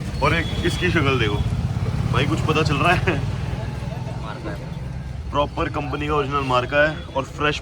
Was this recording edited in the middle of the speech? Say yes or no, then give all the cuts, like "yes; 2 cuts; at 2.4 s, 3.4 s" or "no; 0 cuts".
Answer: no; 0 cuts